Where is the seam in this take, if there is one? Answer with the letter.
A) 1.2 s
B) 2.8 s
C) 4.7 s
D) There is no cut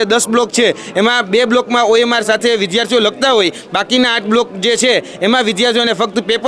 D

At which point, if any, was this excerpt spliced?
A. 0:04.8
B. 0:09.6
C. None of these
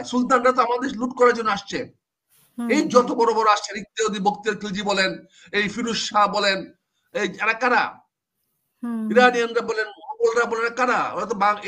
C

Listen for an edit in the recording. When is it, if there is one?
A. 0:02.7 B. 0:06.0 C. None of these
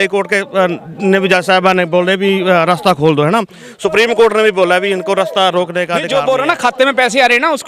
B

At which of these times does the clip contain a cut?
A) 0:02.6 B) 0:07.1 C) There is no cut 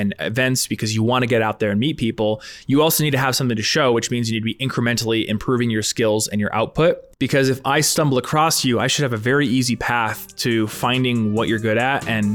B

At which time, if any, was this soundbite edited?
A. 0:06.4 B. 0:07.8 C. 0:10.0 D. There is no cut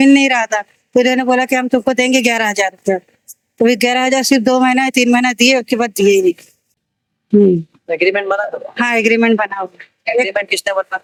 D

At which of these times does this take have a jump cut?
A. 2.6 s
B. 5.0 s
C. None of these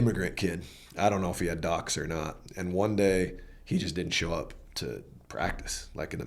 C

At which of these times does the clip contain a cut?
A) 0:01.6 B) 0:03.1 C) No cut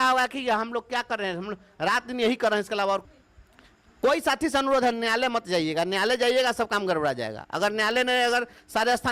B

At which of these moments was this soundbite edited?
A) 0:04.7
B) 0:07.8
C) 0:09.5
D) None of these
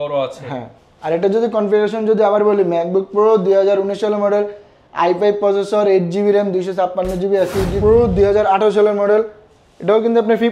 B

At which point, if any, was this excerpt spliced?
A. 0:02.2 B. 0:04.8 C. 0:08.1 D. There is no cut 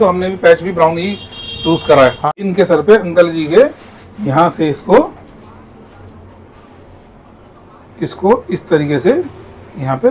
A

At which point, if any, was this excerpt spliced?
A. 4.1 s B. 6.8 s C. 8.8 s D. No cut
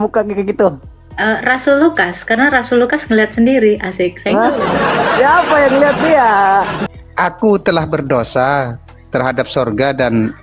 B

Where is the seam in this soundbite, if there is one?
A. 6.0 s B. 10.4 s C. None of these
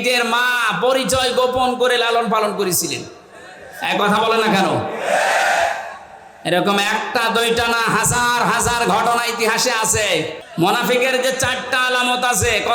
B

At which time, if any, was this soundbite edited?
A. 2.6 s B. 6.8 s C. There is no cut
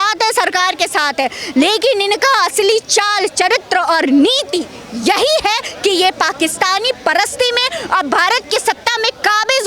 C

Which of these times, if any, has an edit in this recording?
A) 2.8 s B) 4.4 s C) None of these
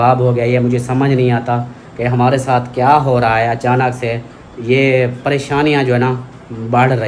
C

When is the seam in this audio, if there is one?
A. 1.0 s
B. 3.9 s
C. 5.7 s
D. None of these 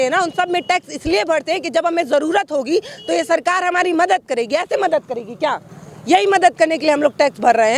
D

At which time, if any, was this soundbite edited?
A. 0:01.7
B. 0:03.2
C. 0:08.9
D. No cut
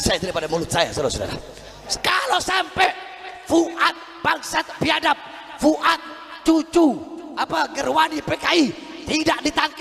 A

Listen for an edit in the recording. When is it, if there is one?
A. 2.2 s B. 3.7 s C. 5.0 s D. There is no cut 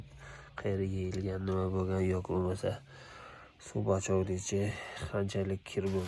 D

